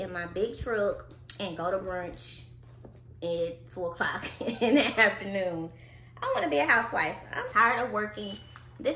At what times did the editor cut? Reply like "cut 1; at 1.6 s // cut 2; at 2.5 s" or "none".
cut 1; at 7.5 s